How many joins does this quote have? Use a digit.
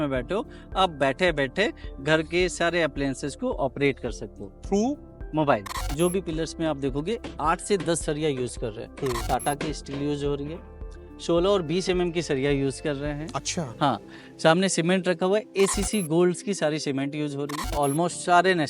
2